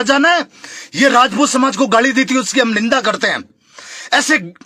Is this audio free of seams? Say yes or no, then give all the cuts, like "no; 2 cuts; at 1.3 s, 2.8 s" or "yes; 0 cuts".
yes; 0 cuts